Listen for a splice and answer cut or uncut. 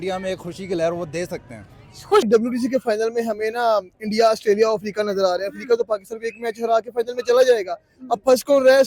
cut